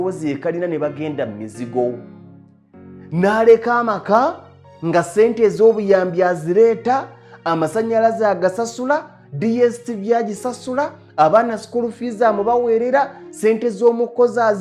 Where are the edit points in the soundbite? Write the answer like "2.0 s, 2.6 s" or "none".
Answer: none